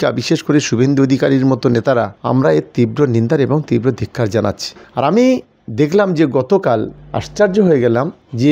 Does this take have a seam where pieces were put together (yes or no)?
no